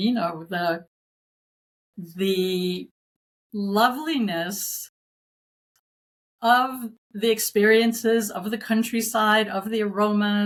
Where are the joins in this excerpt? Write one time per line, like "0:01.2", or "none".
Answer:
none